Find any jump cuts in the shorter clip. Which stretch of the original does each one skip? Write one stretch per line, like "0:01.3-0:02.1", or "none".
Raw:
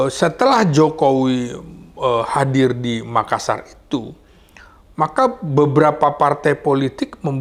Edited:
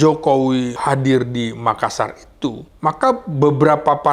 0:01.5-0:02.3
0:04.2-0:04.8